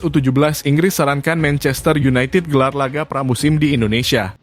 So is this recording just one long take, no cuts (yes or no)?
yes